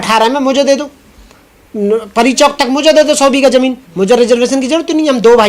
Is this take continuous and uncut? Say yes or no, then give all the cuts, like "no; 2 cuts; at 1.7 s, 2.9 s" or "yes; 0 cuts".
yes; 0 cuts